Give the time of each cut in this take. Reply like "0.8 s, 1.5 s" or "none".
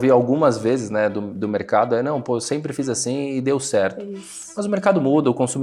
none